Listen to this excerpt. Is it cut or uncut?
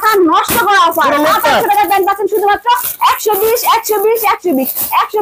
uncut